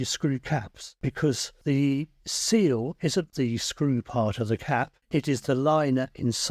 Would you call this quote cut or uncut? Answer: cut